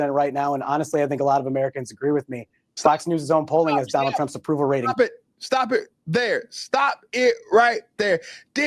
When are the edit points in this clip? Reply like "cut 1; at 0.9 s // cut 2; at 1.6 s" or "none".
none